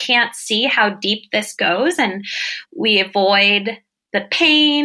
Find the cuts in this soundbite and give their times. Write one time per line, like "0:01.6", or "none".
0:02.5

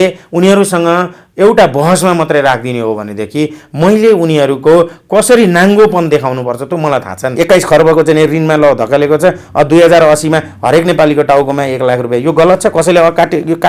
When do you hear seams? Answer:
0:07.3

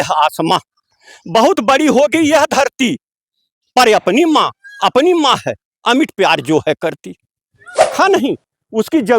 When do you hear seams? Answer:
0:07.9

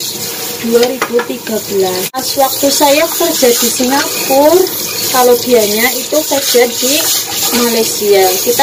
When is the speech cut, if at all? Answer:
0:02.2

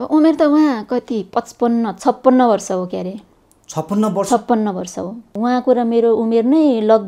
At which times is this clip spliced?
0:05.4

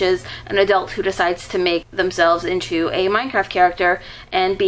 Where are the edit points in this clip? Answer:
0:01.9

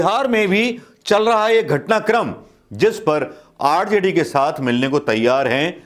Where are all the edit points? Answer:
none

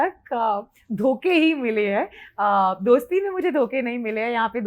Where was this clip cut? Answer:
none

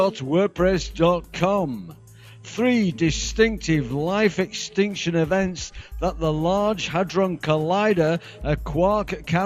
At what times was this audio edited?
0:06.1

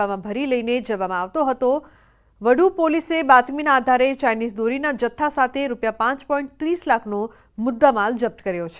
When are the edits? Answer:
0:07.4

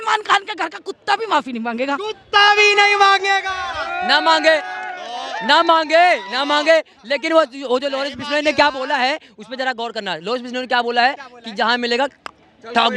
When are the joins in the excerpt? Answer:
none

